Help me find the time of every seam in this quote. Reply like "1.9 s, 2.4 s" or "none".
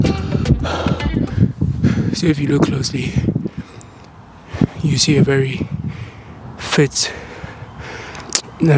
none